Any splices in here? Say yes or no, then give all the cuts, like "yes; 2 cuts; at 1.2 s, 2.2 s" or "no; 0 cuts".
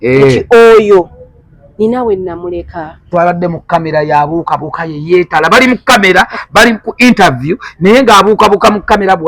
yes; 1 cut; at 3.1 s